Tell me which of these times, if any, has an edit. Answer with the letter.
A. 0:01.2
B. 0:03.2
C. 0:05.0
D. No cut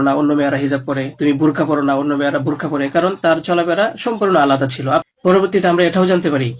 C